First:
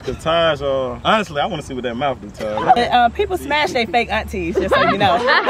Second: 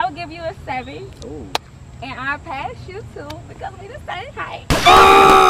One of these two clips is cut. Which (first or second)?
first